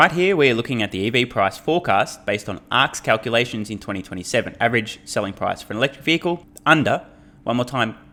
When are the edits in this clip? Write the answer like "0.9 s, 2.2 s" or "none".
none